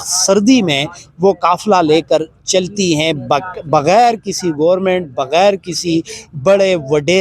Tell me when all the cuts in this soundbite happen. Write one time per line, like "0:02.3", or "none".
none